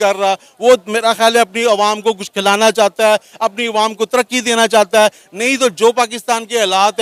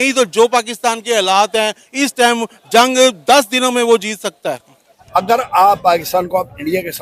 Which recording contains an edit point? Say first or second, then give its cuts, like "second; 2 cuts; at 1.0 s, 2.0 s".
second; 1 cut; at 5.0 s